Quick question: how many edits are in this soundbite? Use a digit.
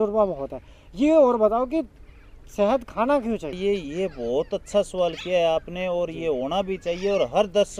1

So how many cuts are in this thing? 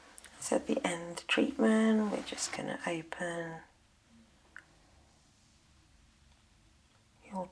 0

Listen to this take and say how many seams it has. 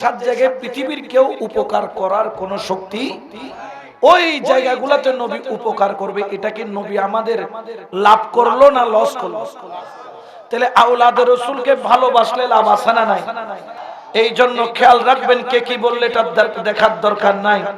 1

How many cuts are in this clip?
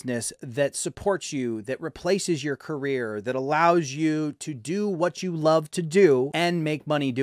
1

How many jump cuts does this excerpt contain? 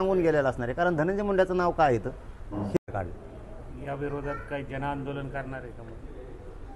1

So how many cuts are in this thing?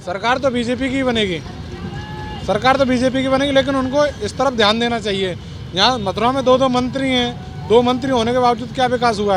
0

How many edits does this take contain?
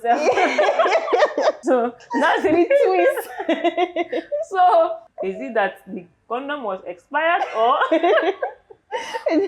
2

